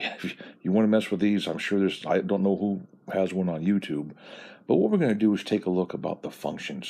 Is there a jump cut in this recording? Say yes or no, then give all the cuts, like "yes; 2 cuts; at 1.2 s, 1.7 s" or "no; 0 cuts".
yes; 1 cut; at 4.5 s